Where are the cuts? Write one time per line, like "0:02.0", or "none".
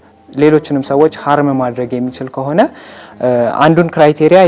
none